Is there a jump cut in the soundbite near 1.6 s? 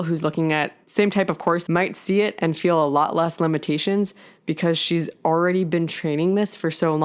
yes; 1 cut; at 1.6 s

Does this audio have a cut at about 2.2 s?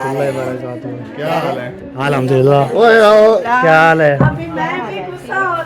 no; 1 cut; at 3.4 s

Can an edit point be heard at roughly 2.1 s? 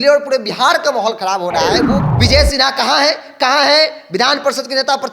yes; 1 cut; at 2.1 s

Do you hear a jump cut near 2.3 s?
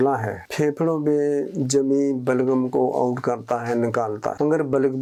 no; 0 cuts

